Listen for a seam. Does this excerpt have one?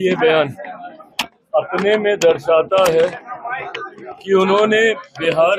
no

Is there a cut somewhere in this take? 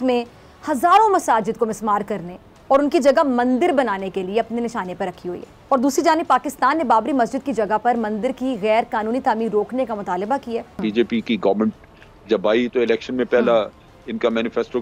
yes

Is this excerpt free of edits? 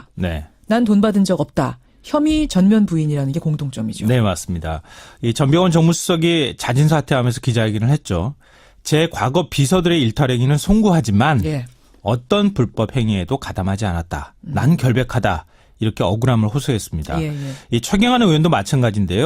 no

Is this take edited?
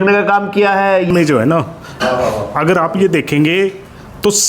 yes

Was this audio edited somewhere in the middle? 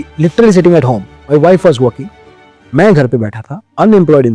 no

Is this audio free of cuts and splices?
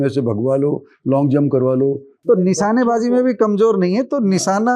no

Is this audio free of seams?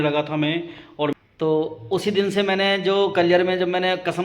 no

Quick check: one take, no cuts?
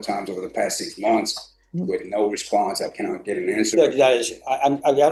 yes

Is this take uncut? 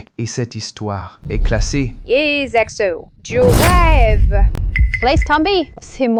yes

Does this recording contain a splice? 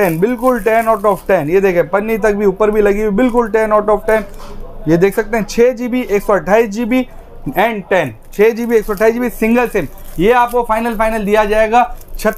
no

